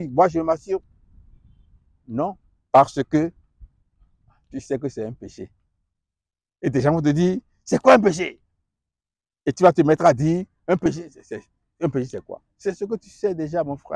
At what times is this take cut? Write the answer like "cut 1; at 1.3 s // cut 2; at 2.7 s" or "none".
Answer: none